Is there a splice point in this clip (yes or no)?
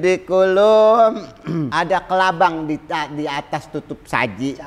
yes